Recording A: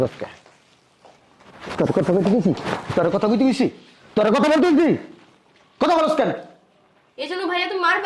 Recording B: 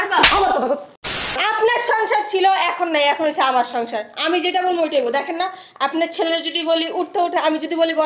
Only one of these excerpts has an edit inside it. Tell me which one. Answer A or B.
B